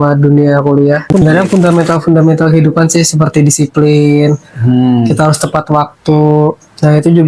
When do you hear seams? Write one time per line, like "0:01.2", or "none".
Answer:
0:01.2